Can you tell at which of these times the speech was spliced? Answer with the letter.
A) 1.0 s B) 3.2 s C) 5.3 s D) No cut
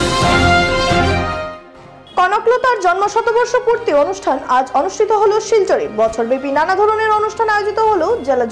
D